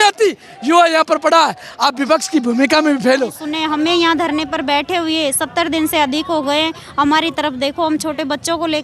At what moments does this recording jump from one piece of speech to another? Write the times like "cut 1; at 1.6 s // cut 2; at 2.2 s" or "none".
cut 1; at 3.5 s